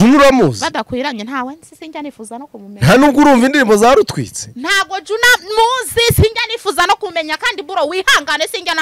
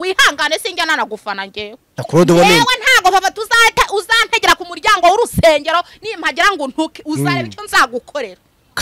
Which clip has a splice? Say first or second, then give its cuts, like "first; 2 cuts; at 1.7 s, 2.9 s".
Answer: second; 1 cut; at 1.8 s